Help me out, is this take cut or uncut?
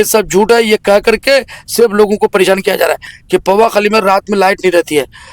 cut